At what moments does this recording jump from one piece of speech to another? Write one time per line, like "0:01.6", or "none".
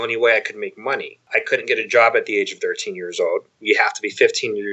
0:01.2